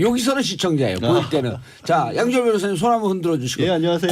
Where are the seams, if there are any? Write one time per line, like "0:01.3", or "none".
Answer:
0:01.6